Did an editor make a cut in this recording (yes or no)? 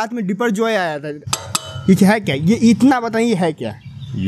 yes